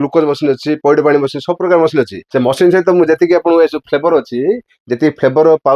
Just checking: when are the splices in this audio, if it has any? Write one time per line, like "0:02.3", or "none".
0:02.2

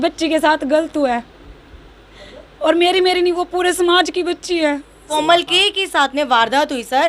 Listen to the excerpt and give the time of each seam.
0:05.1

